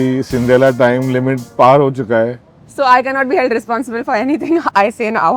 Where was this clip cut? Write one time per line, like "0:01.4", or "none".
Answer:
0:01.4